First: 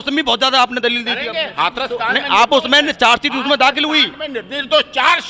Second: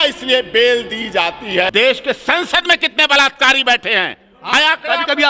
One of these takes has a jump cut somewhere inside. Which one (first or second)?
second